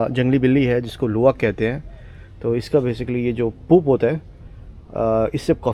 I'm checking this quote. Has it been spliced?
no; 0 cuts

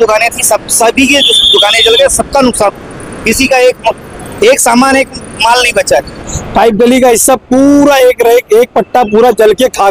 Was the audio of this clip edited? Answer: yes; 1 cut; at 6.2 s

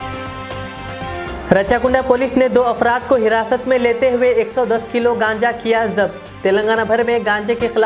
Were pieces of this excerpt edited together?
yes; 1 cut; at 1.2 s

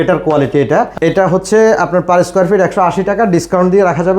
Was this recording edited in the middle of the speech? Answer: yes; 1 cut; at 0.9 s

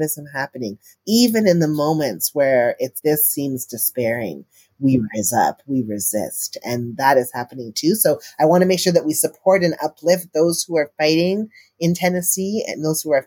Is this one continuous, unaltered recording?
no; 1 cut; at 0.9 s

